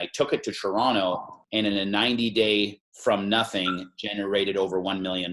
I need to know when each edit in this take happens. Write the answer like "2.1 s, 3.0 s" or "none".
1.3 s, 2.8 s